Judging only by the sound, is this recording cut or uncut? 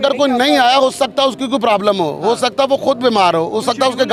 uncut